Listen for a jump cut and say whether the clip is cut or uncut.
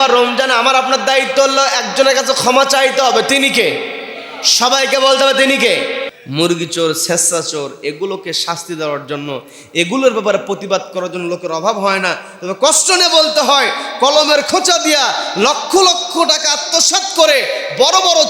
cut